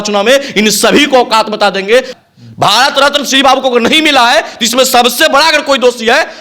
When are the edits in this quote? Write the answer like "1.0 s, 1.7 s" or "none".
2.1 s